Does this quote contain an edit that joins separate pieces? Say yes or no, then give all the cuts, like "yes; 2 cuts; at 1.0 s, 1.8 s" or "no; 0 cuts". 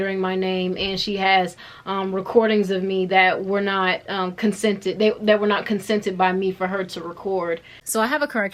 no; 0 cuts